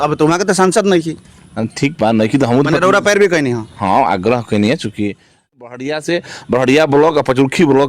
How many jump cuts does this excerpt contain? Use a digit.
1